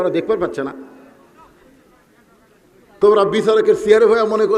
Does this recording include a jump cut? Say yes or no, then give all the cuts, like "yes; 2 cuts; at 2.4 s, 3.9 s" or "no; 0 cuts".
yes; 1 cut; at 2.8 s